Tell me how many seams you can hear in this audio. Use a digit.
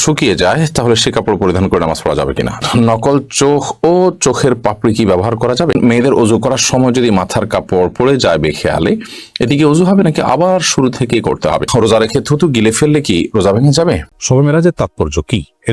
4